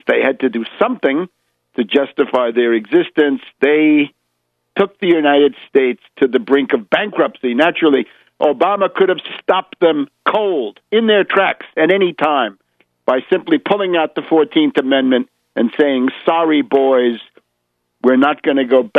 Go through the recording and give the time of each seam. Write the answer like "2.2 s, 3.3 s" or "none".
12.1 s